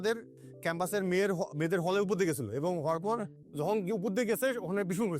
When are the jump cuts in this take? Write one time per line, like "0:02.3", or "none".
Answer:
0:03.4

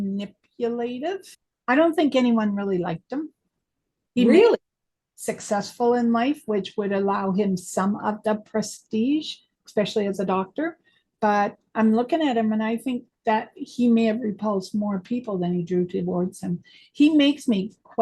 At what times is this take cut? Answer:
0:01.4

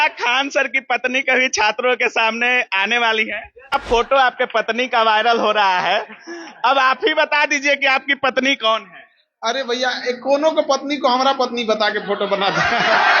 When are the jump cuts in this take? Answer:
0:03.7

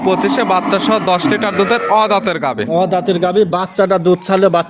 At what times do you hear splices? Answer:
none

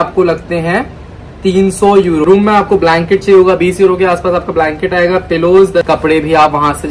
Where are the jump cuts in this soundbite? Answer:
0:02.2
0:05.8

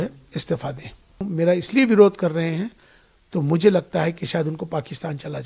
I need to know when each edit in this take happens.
0:01.3

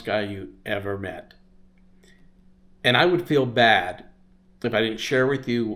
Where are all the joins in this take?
none

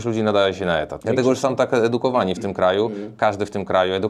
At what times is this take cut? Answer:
0:00.9

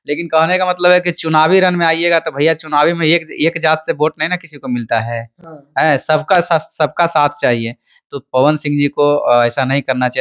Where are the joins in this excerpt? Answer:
none

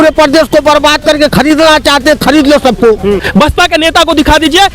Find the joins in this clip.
0:03.3

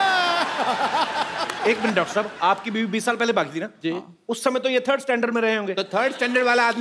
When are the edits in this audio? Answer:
none

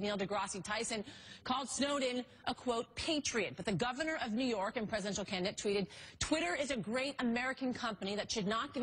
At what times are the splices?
0:05.9

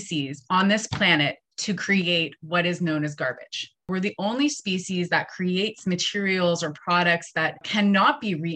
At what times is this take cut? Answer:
0:03.9
0:07.6

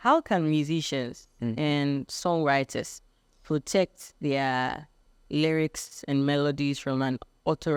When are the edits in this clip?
none

